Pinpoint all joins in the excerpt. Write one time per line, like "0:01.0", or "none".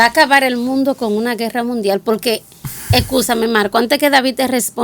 none

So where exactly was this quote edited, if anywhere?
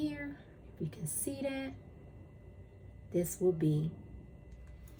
none

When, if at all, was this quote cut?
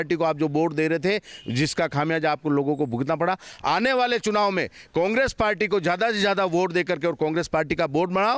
none

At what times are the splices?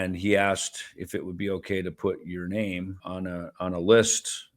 0:03.0

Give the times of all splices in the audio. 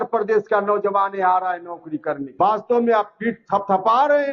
0:02.3

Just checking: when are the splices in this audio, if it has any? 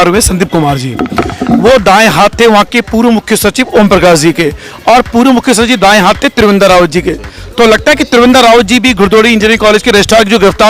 none

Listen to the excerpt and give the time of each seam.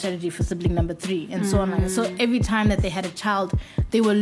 none

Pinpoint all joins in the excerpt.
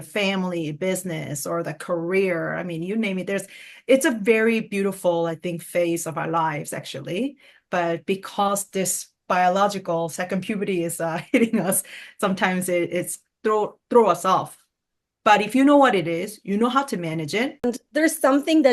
0:17.6

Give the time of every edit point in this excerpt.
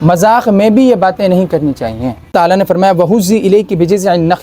0:02.3

